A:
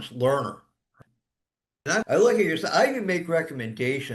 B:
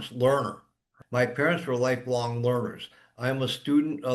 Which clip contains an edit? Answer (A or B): A